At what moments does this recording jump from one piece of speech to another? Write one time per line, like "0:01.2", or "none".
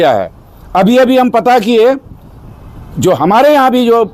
none